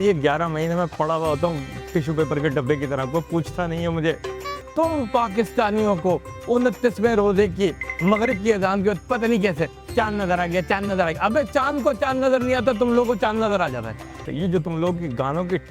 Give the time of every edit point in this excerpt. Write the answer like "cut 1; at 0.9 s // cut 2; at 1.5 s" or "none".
cut 1; at 4.6 s // cut 2; at 13.9 s

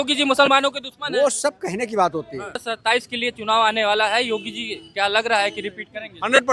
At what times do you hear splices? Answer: cut 1; at 2.7 s

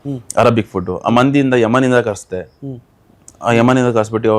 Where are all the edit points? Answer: none

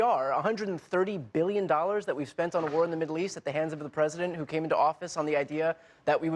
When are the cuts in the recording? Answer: none

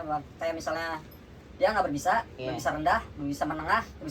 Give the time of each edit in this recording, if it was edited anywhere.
none

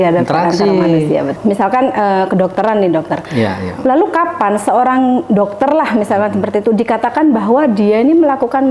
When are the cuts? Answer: cut 1; at 1.4 s

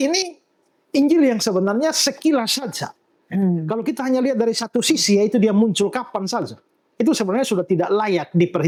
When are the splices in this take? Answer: none

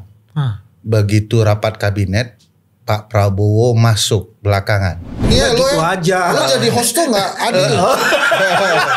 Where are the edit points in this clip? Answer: cut 1; at 5.3 s

